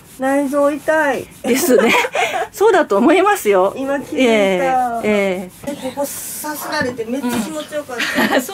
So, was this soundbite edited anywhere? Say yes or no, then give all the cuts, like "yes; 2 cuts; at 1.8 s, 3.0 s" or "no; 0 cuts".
yes; 1 cut; at 5.7 s